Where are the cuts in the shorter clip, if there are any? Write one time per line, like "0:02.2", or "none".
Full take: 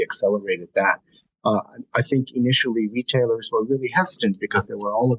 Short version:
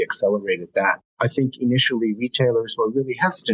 0:01.1